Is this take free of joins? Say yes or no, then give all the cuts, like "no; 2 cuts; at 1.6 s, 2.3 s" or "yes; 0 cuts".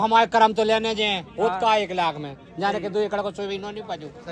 yes; 0 cuts